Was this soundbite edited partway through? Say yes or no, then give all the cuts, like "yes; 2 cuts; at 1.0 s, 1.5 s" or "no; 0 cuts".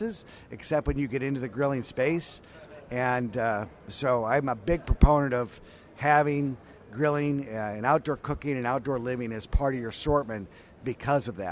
no; 0 cuts